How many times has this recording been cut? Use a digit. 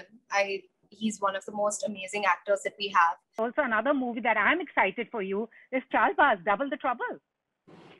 1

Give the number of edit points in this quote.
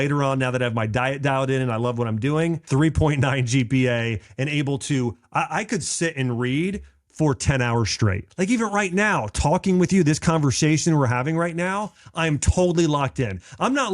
2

